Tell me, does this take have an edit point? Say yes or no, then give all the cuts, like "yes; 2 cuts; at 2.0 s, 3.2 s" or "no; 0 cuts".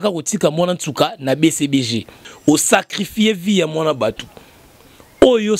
yes; 1 cut; at 2.2 s